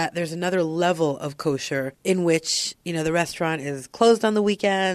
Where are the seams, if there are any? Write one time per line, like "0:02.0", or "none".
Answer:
0:01.9

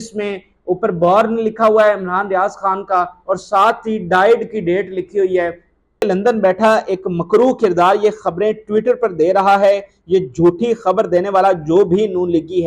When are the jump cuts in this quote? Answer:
0:06.0

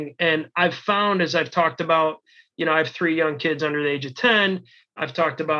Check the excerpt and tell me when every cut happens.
none

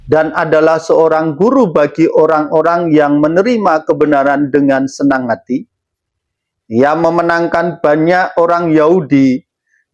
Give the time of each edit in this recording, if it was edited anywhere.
none

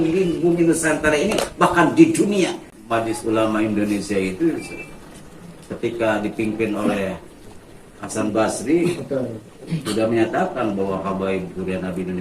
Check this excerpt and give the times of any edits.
0:02.7

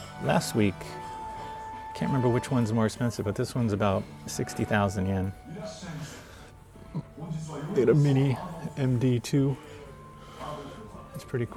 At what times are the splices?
none

